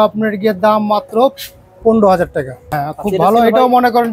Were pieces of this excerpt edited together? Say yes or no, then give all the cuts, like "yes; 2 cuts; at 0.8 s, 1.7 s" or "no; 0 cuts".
yes; 1 cut; at 2.8 s